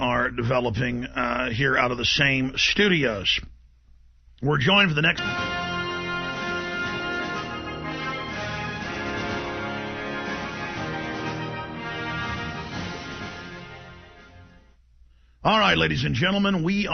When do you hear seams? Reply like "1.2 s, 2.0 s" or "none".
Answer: none